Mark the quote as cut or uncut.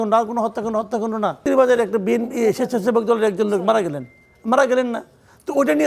cut